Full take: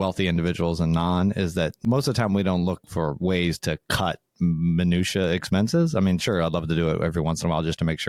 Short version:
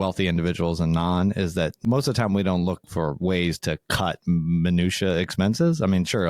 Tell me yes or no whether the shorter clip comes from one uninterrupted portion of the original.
no